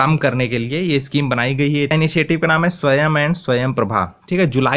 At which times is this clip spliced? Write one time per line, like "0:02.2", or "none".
0:01.9